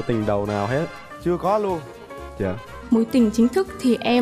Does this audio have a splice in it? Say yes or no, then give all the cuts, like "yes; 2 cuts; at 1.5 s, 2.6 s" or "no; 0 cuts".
yes; 1 cut; at 2.8 s